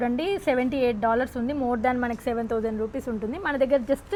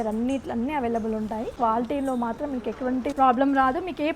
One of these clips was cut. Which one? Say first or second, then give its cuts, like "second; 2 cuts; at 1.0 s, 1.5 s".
second; 2 cuts; at 1.5 s, 3.1 s